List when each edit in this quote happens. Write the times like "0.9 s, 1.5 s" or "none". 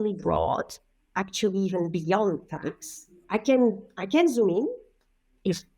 3.2 s